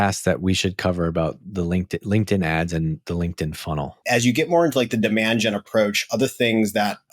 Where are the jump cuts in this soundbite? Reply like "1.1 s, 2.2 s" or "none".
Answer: 3.9 s